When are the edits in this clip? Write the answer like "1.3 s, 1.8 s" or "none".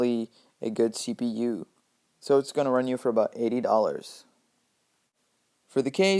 none